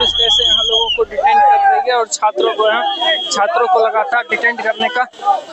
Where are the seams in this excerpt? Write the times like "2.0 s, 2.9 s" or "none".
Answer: none

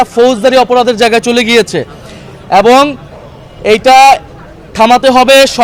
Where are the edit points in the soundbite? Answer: none

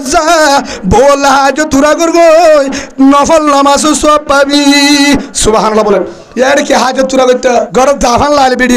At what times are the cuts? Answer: 6.2 s, 7.7 s

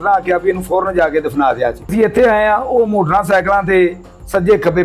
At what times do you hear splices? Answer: 1.9 s

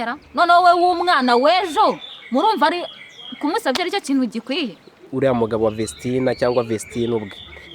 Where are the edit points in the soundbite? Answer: 5.1 s

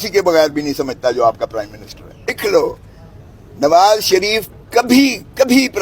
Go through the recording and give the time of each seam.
2.4 s

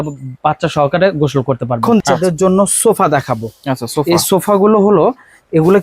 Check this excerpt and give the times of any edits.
1.8 s

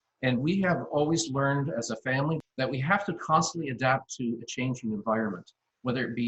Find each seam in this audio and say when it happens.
2.4 s

